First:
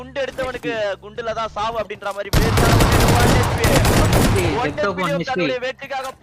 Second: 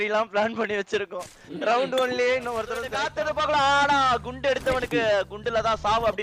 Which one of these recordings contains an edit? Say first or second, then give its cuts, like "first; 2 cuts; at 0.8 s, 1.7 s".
second; 1 cut; at 2.8 s